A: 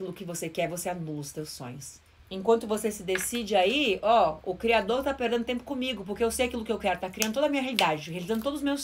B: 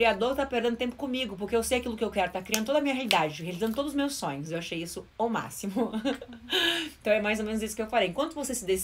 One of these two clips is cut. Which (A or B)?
A